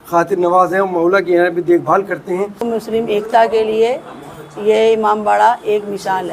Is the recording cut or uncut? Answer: cut